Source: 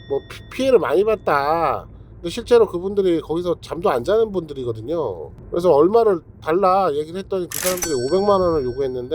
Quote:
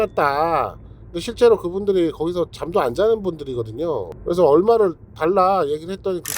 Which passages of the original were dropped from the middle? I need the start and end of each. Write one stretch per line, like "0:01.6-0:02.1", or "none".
0:05.2-0:05.4